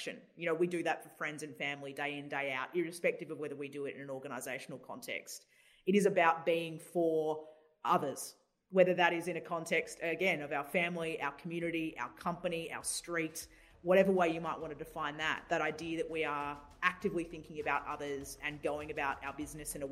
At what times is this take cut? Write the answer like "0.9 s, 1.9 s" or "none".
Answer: 15.4 s